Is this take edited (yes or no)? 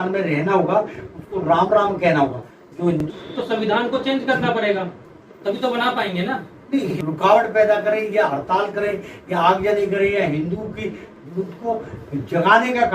yes